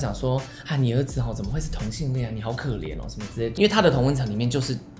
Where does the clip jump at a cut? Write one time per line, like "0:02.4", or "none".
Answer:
0:03.5